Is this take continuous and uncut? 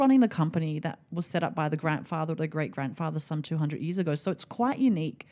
yes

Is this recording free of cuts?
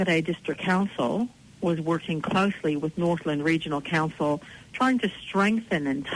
no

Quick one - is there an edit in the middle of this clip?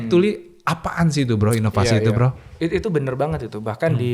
no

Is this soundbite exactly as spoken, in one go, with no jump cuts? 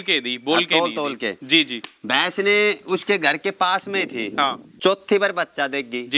no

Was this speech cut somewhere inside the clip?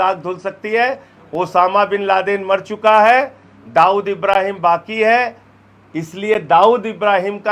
no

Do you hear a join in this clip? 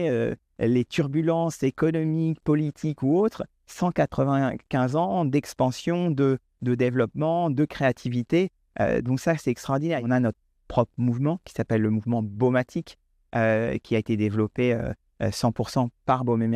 yes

